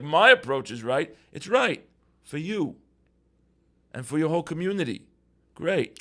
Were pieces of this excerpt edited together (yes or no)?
no